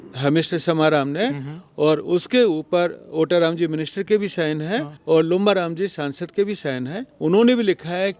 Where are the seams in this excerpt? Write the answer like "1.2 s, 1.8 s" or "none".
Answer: 4.9 s, 7.0 s